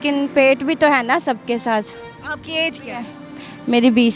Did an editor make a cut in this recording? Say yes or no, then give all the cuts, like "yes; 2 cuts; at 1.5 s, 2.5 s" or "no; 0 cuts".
no; 0 cuts